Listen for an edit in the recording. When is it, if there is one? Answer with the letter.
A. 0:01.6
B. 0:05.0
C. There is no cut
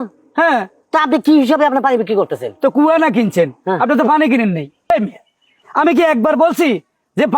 B